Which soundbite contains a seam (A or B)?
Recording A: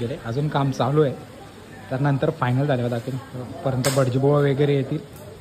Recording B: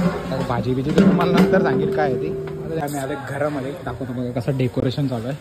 B